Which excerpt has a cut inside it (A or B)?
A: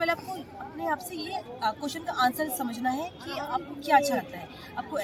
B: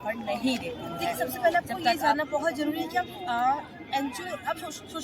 B